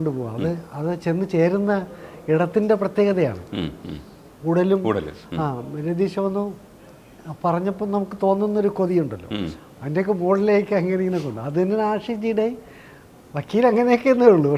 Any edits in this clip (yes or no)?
no